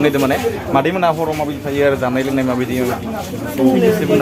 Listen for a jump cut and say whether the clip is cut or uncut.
uncut